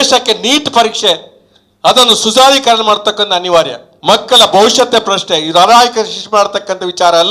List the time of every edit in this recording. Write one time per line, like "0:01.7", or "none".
0:03.9